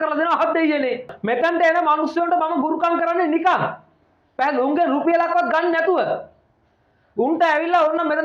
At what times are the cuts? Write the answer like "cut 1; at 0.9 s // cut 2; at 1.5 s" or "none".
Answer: cut 1; at 1.1 s